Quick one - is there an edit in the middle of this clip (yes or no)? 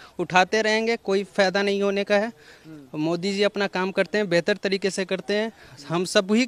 no